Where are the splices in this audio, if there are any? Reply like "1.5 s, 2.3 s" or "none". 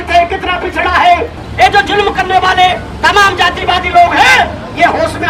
1.4 s